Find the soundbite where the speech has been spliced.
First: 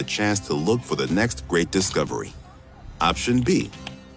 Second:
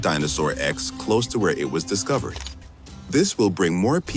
first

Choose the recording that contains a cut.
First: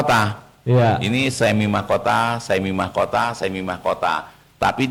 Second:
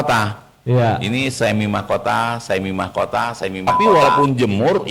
second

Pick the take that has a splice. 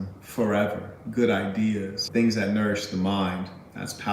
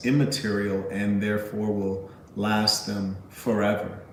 first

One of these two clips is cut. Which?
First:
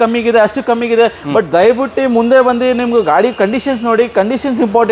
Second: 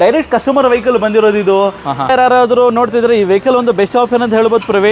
second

